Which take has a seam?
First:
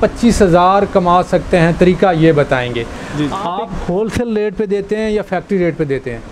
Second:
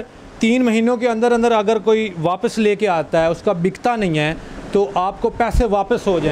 first; 1 cut; at 3.4 s

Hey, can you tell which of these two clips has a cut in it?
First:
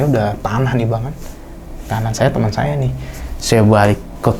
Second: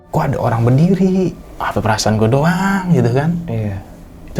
second; 1 cut; at 1.5 s

